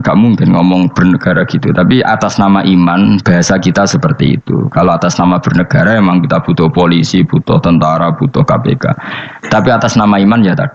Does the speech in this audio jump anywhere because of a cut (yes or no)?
no